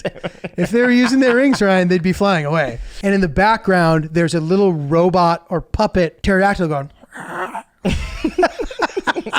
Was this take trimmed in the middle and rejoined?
yes; 2 cuts; at 2.9 s, 6.2 s

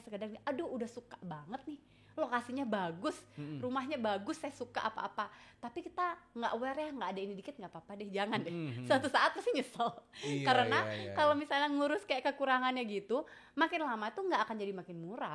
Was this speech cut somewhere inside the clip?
no; 0 cuts

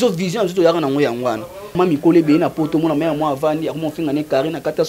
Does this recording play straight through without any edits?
no; 1 cut; at 1.7 s

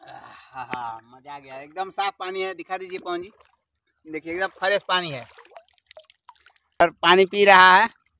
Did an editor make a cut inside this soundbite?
yes; 1 cut; at 6.8 s

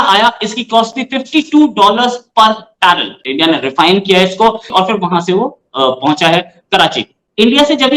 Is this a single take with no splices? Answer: no; 1 cut; at 4.6 s

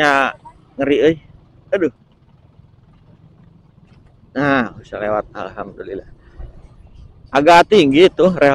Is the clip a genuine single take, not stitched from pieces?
yes; 0 cuts

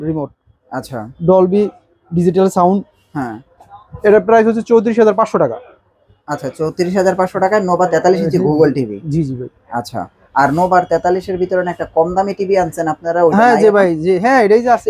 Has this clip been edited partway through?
no; 0 cuts

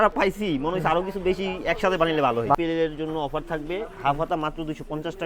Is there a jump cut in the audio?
yes; 1 cut; at 2.5 s

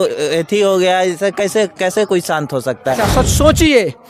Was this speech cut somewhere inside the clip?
yes; 1 cut; at 2.7 s

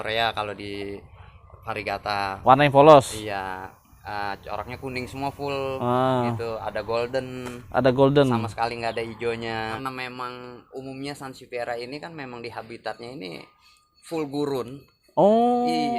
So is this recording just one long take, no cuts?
no; 1 cut; at 9.9 s

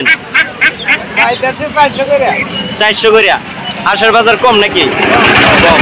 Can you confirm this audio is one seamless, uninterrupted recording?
yes; 0 cuts

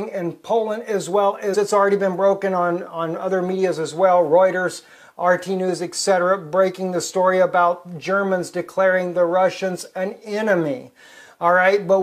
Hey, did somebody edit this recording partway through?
no; 0 cuts

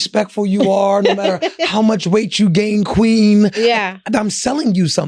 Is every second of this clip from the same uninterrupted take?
yes; 0 cuts

